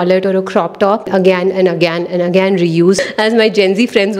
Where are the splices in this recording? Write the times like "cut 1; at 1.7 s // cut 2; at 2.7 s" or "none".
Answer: cut 1; at 1.1 s // cut 2; at 3.0 s